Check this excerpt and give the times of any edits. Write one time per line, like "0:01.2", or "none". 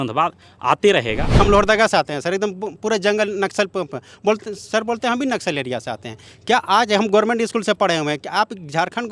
0:01.2